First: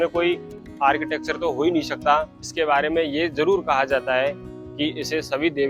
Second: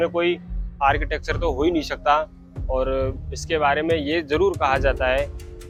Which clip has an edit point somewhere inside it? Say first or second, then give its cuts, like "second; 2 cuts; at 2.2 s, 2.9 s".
first; 1 cut; at 2.4 s